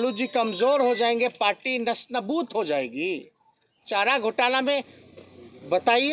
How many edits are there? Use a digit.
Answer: 1